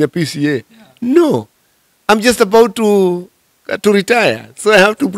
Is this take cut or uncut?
uncut